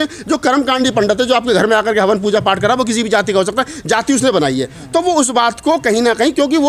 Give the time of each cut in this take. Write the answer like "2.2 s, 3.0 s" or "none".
none